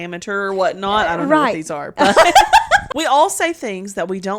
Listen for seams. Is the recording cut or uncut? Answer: cut